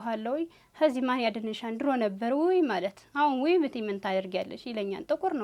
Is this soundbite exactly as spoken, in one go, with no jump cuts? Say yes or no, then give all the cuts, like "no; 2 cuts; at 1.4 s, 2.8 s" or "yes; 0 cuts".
yes; 0 cuts